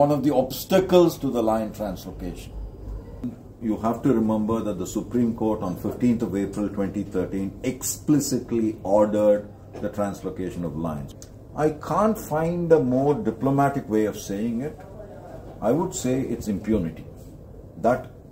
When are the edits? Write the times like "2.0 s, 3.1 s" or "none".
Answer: 3.2 s, 11.1 s

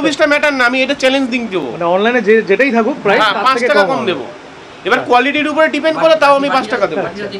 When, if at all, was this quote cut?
none

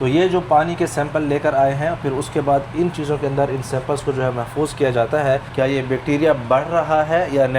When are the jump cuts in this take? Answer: 5.5 s

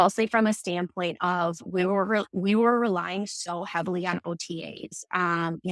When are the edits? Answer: none

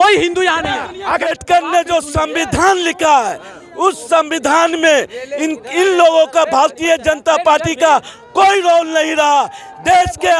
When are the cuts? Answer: 1.2 s

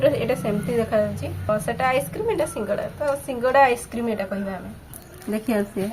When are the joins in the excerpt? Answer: 1.5 s, 4.9 s

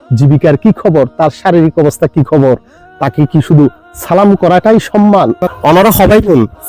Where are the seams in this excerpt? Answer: 5.5 s

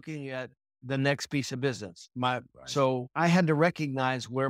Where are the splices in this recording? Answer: 3.1 s

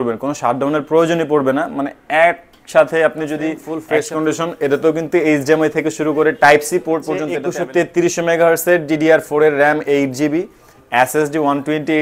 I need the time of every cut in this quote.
3.7 s, 7.4 s

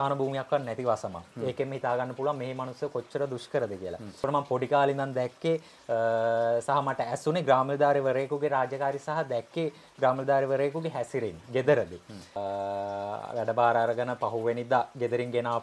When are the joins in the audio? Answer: 4.2 s, 12.4 s

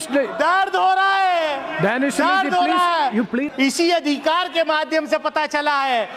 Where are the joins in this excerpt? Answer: 3.5 s

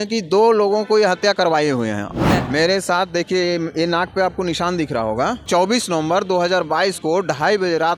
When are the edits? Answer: 2.3 s, 5.5 s

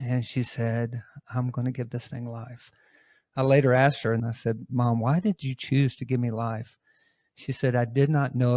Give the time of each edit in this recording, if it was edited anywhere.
4.2 s

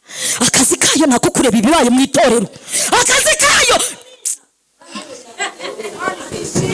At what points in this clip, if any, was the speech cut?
none

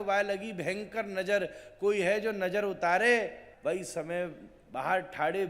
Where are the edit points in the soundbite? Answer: 3.4 s

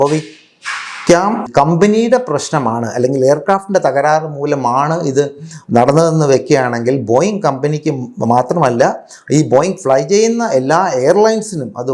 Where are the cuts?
1.5 s

